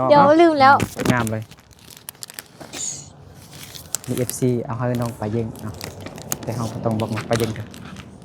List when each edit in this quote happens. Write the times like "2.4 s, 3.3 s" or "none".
0.9 s